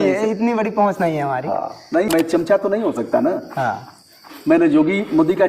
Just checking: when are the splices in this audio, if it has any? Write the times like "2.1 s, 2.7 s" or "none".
2.1 s